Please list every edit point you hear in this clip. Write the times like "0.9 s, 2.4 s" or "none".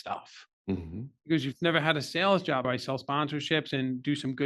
2.7 s